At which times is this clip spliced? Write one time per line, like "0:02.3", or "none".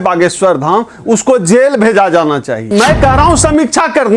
0:02.6